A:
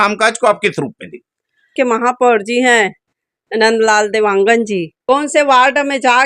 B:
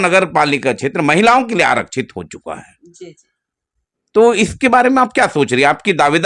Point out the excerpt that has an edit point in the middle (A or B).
A